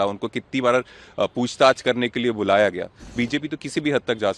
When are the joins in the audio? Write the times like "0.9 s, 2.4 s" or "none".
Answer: 3.0 s